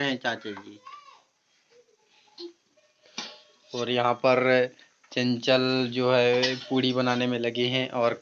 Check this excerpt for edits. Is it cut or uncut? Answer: uncut